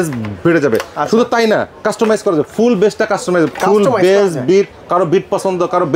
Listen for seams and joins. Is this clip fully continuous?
yes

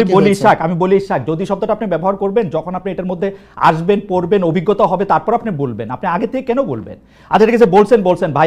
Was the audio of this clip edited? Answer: no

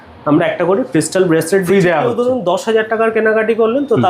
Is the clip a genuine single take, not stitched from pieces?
yes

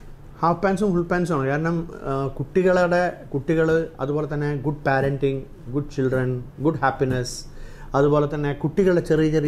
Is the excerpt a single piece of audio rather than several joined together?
yes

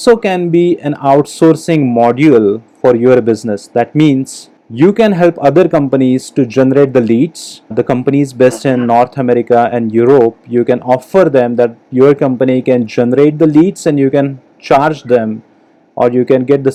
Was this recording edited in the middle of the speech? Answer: no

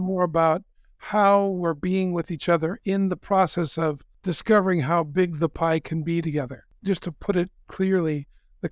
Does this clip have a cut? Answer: yes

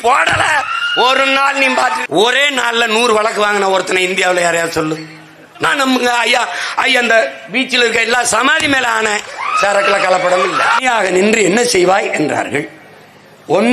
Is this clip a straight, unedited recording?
no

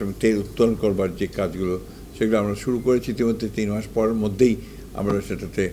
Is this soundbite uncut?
yes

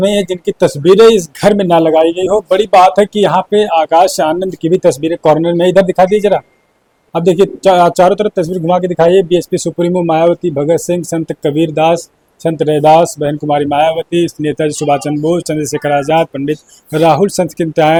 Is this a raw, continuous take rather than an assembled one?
yes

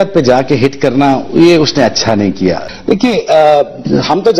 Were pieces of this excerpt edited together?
no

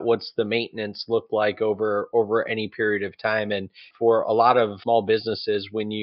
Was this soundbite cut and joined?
yes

